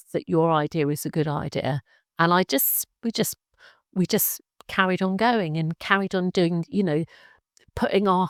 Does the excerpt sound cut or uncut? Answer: uncut